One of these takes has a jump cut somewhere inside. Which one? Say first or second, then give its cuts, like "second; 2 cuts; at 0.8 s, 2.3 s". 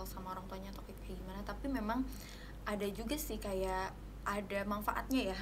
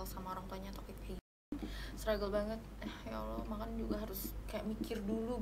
second; 1 cut; at 1.6 s